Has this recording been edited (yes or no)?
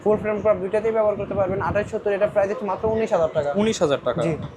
no